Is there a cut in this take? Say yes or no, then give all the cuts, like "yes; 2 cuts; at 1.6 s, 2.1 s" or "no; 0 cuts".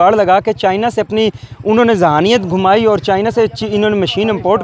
no; 0 cuts